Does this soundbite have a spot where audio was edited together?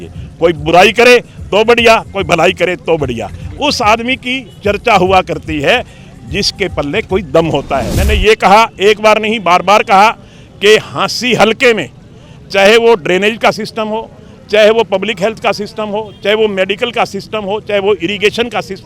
yes; 1 cut; at 8.0 s

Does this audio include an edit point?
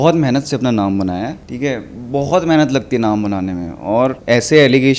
yes; 2 cuts; at 1.4 s, 4.2 s

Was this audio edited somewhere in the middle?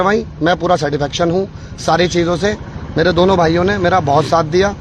no; 0 cuts

